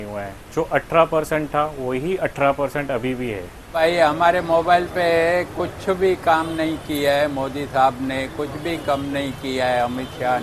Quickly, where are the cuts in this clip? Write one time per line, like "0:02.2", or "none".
0:03.7

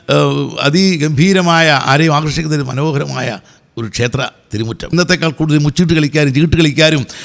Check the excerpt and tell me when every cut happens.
0:04.9

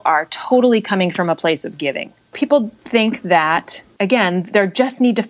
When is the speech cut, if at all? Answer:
0:02.3

